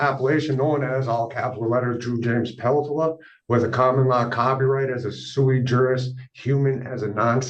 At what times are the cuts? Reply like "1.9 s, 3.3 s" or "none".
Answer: none